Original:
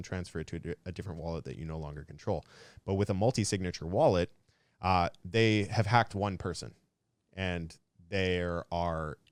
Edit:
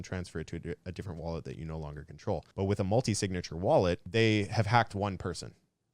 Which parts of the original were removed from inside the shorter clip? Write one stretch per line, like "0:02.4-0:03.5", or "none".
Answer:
0:02.5-0:02.8
0:04.3-0:05.2